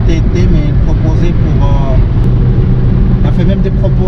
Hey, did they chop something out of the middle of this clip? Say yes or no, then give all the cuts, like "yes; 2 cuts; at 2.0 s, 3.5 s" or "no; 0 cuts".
yes; 1 cut; at 2.2 s